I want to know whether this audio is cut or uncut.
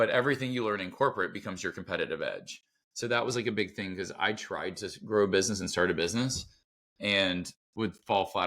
uncut